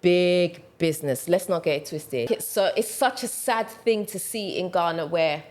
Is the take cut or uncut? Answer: cut